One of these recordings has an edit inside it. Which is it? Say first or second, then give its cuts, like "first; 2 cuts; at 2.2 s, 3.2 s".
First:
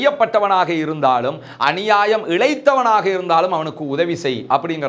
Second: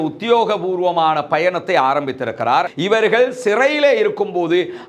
second; 1 cut; at 2.7 s